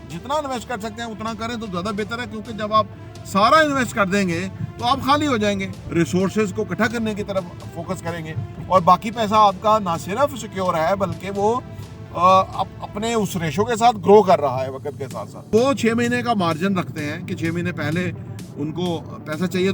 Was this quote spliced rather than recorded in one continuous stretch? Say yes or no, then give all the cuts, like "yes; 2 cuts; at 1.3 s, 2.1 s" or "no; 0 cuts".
yes; 2 cuts; at 5.8 s, 15.5 s